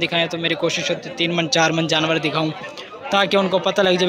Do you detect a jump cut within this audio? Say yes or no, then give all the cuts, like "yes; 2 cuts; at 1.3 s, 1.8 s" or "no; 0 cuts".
no; 0 cuts